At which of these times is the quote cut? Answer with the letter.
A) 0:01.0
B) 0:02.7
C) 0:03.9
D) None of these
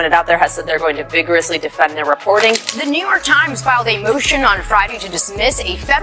B